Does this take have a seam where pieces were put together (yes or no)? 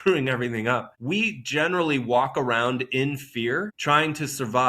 yes